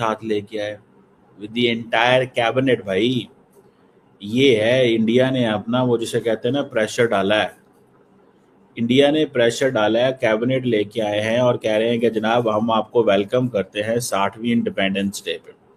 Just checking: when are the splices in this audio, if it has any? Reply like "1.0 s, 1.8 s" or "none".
none

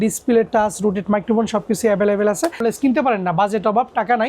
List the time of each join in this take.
2.6 s

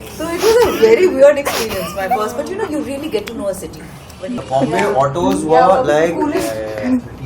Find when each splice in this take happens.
4.3 s

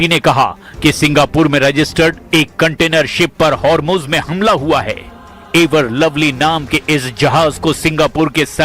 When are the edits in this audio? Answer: 1.5 s

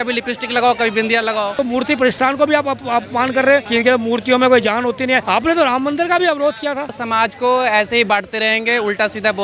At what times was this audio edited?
1.5 s, 3.7 s, 5.2 s, 7.0 s

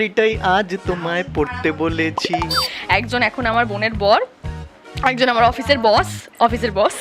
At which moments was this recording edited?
2.7 s

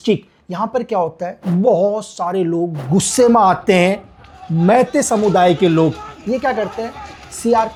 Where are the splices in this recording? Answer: none

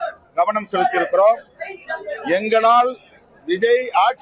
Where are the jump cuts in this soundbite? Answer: none

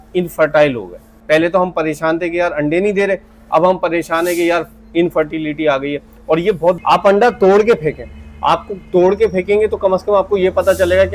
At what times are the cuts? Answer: 1.2 s, 6.8 s

